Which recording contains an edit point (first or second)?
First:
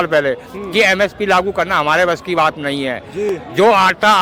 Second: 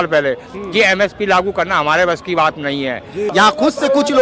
second